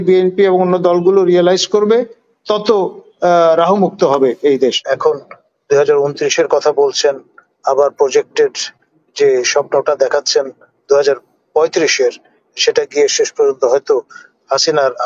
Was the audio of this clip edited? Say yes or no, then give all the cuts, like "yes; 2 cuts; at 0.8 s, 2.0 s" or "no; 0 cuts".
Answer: yes; 1 cut; at 4.8 s